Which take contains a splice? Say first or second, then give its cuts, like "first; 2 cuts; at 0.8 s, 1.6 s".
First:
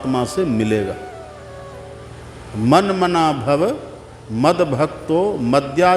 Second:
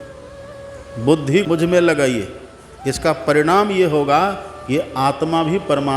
second; 1 cut; at 1.3 s